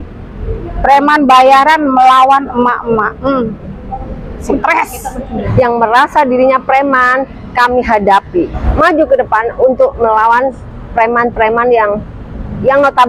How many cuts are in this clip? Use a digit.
2